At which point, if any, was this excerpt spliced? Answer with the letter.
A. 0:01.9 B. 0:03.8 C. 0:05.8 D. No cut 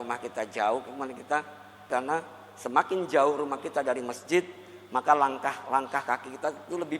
A